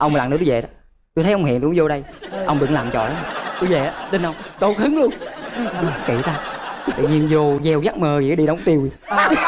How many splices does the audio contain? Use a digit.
0